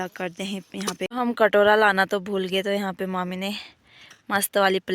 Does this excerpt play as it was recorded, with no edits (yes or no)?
no